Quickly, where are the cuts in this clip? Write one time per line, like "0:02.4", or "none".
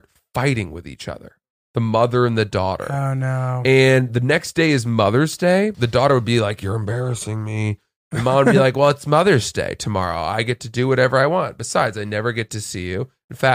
0:05.8